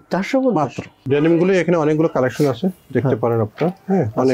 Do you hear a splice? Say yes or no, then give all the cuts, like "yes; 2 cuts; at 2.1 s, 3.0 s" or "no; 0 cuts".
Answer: yes; 1 cut; at 0.9 s